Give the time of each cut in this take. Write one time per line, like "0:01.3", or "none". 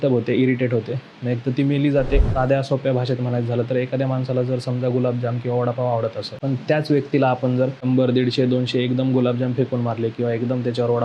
0:02.3
0:06.3
0:07.8